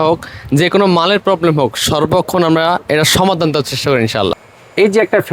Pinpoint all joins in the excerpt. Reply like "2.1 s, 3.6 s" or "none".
4.4 s